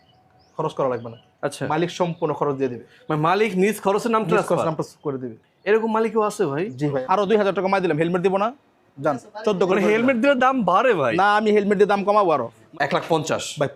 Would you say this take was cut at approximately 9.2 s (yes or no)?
no